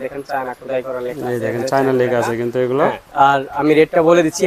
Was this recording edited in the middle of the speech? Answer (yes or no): no